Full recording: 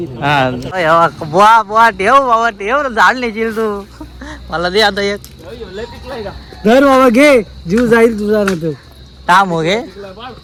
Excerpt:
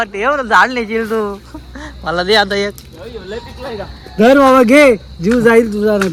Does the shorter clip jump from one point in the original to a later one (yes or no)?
no